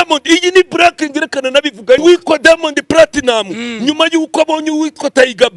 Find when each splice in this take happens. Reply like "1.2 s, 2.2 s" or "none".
2.0 s